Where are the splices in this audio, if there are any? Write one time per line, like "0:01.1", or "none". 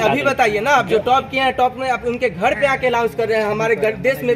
none